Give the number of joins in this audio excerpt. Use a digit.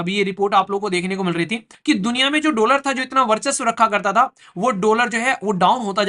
1